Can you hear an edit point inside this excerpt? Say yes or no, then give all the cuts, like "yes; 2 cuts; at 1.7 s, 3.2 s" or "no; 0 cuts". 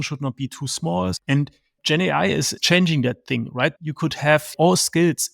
yes; 2 cuts; at 1.2 s, 4.0 s